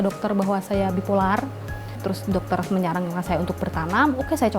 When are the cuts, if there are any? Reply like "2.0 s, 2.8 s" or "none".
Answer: 1.7 s

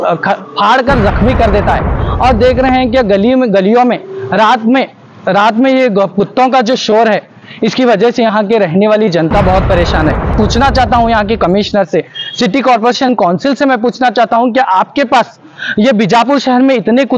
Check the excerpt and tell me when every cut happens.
10.3 s

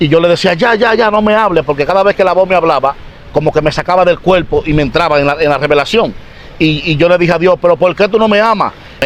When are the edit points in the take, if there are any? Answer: none

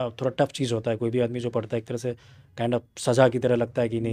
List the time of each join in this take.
none

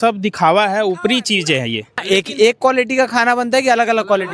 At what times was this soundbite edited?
1.9 s

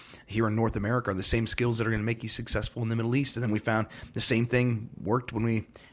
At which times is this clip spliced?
none

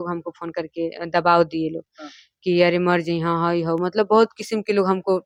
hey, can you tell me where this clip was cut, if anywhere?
none

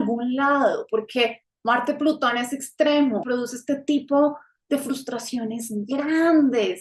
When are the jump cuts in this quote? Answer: 3.2 s

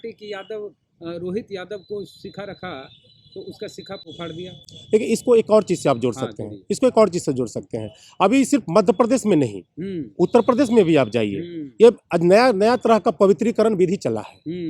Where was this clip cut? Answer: none

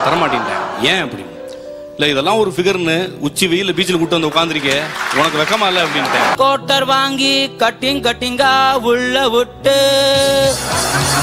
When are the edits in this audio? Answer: 6.3 s

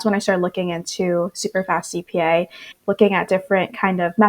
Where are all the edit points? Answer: 2.7 s

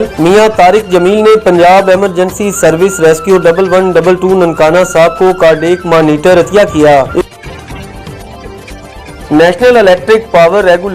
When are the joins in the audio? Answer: 7.2 s, 9.3 s

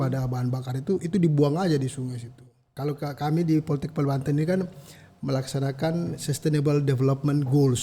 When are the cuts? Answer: 2.7 s

